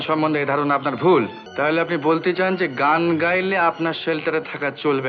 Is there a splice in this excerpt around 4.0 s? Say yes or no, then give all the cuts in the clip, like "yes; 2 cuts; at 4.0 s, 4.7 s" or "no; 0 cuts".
no; 1 cut; at 1.4 s